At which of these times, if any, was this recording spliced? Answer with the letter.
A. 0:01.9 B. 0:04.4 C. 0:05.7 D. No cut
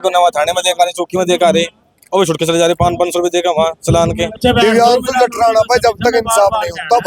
B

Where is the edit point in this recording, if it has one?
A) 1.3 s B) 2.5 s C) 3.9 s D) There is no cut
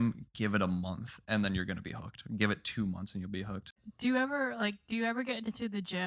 C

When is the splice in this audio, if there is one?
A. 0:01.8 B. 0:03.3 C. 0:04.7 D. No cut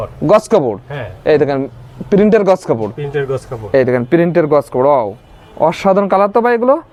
D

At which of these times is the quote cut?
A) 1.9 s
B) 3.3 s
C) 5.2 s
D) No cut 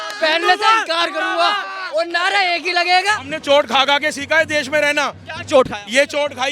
B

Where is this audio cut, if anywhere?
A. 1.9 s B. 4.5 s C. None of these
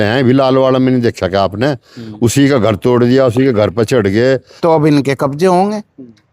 B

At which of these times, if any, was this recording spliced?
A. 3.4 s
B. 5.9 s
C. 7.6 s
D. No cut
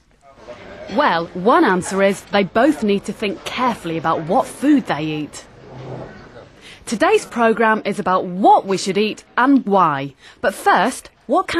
B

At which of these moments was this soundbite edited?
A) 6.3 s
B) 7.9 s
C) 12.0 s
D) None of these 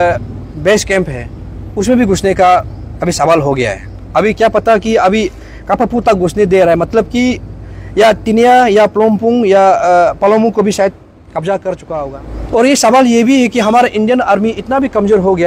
C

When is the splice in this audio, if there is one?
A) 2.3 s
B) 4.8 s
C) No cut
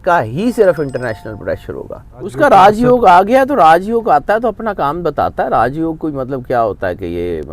A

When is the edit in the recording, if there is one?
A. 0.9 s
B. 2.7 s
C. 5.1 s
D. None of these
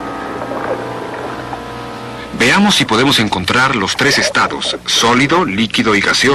B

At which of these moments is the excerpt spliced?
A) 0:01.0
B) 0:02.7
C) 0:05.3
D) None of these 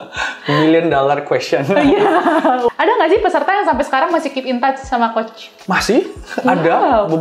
B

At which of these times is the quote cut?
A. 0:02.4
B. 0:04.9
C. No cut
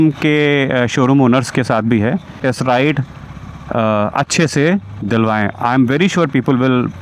A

